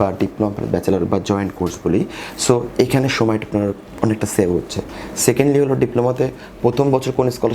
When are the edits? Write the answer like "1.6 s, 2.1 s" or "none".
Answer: none